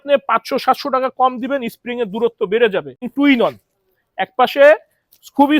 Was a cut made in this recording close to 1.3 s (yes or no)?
no